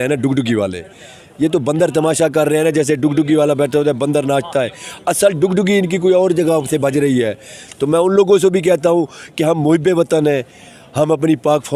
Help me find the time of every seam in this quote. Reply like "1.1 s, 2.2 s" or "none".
none